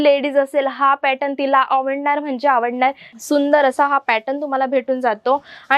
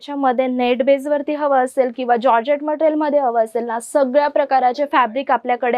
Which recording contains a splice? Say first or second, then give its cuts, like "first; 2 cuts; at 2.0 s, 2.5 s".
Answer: first; 1 cut; at 3.1 s